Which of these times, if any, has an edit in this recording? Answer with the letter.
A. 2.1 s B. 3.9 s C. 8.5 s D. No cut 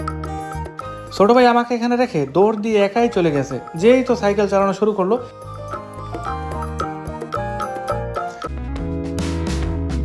C